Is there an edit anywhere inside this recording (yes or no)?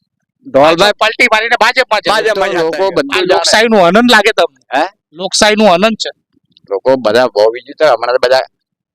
yes